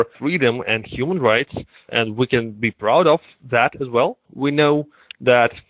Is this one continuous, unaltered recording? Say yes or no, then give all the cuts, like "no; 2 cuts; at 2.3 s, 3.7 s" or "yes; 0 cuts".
yes; 0 cuts